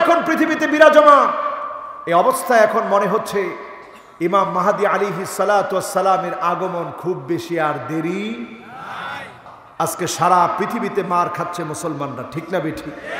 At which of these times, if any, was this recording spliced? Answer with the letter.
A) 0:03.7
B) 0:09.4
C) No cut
B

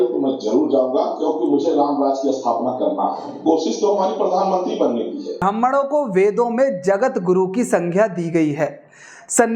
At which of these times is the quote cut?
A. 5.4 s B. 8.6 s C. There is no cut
A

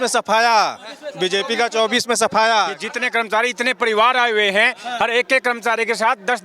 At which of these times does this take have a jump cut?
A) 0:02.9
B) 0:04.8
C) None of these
A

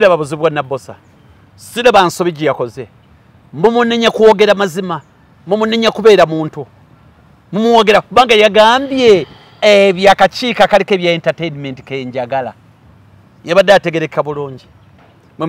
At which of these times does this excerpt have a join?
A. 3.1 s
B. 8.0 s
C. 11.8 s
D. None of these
D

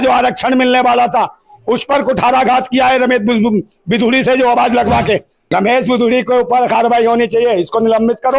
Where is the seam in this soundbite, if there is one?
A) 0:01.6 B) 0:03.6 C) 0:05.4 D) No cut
C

